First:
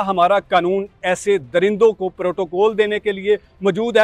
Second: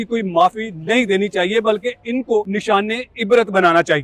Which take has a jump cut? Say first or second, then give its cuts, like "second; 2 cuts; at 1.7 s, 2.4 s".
second; 1 cut; at 2.5 s